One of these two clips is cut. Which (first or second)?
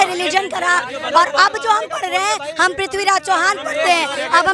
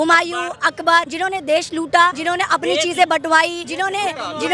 second